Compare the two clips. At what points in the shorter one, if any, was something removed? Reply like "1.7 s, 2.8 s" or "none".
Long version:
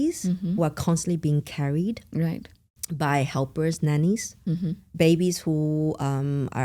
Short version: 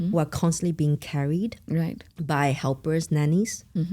2.1 s